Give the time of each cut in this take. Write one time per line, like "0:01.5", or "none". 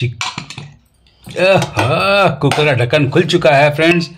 none